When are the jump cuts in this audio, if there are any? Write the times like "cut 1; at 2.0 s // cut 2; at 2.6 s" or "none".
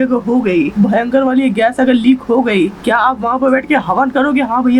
cut 1; at 2.8 s